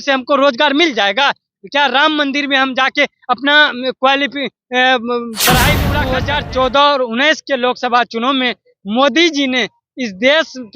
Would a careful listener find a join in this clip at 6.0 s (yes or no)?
yes